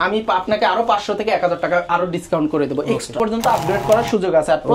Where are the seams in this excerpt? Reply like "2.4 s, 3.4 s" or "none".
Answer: 3.2 s